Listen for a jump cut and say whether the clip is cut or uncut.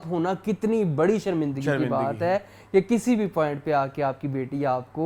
uncut